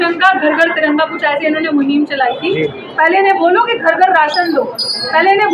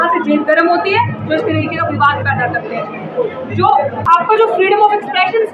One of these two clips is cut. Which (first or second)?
second